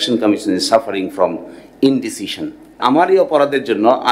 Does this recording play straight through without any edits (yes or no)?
no